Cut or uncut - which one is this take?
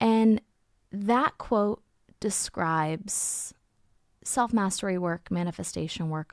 uncut